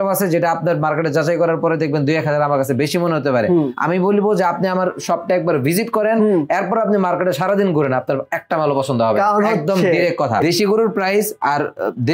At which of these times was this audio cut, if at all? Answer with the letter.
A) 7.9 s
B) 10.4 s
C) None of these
B